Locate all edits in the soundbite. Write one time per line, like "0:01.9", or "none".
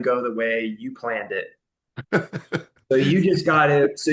none